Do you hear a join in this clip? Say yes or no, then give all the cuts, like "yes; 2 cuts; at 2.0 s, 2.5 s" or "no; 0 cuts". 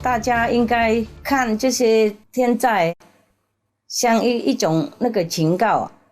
yes; 2 cuts; at 1.1 s, 2.2 s